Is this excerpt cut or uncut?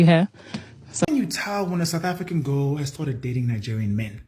cut